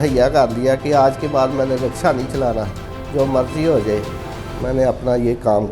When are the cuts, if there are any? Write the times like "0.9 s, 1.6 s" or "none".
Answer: none